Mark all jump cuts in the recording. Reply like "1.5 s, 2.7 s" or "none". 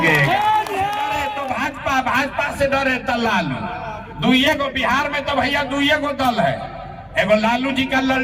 1.3 s